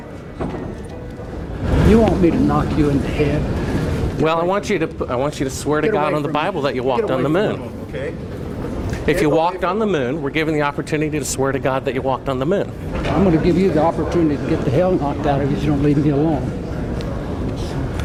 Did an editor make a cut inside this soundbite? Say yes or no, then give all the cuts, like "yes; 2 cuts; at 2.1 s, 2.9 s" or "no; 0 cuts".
no; 0 cuts